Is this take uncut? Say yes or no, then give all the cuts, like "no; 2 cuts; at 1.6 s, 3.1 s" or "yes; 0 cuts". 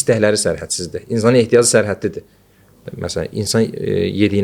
no; 1 cut; at 2.9 s